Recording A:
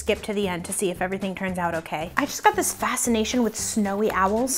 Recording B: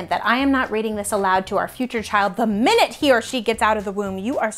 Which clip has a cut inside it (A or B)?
A